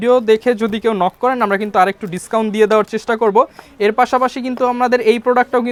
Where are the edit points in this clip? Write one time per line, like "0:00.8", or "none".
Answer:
none

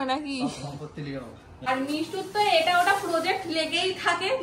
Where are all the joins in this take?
0:01.7

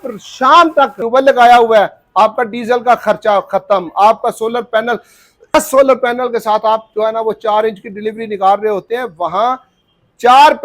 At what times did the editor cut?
0:01.0
0:05.5

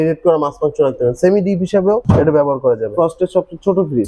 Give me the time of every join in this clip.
0:02.0
0:02.9

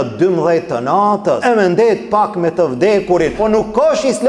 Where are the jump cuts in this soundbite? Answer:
0:01.4
0:03.4

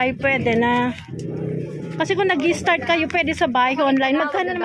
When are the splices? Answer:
none

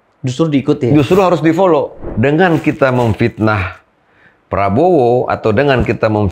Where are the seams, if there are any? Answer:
0:02.0

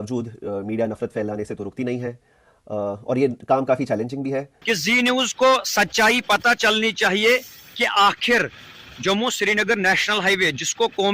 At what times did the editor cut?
0:04.5

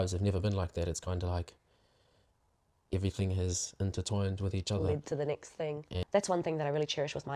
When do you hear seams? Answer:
0:05.9

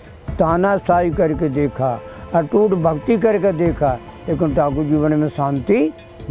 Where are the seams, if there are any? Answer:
none

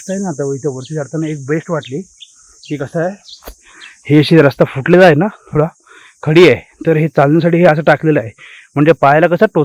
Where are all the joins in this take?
none

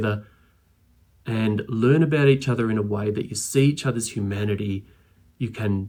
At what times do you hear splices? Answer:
none

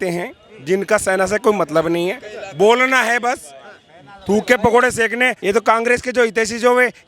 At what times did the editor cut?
0:05.4

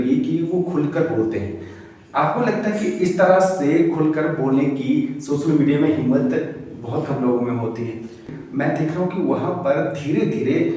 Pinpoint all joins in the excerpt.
0:08.3

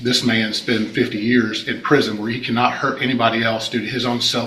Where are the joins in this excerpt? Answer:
none

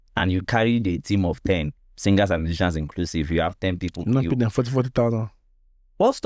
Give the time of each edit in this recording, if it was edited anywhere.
none

